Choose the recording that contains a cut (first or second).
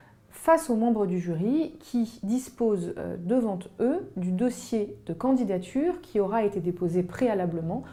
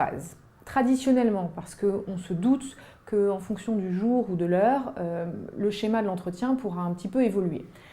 second